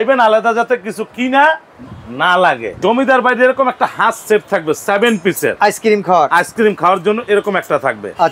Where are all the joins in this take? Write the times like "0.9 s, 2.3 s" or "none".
2.7 s